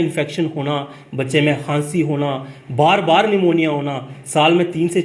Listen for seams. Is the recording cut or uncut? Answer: uncut